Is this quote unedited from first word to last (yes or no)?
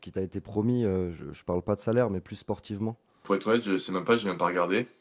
no